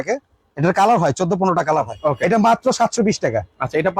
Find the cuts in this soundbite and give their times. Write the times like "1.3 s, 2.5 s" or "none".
1.9 s